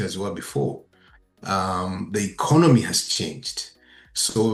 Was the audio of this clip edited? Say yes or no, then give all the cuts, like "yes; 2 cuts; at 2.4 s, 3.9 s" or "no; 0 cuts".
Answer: no; 0 cuts